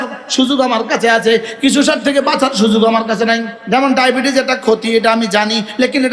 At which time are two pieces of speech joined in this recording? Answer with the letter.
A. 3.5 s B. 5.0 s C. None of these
A